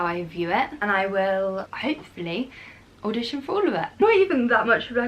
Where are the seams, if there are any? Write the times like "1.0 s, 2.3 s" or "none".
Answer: 0.8 s, 1.7 s, 3.9 s